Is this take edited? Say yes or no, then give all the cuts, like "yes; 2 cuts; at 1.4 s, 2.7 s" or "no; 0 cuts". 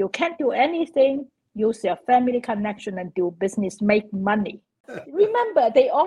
yes; 1 cut; at 4.9 s